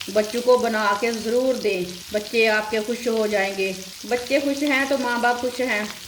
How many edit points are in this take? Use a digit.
2